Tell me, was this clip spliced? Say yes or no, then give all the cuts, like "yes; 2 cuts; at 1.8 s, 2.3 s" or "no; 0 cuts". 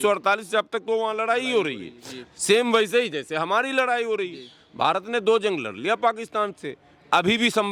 no; 0 cuts